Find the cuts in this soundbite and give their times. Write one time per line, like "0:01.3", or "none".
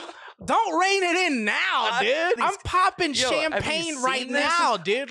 0:02.4